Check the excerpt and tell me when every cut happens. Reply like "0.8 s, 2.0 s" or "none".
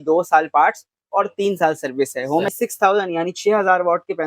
2.5 s